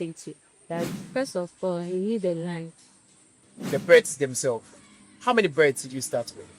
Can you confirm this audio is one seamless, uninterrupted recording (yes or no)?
no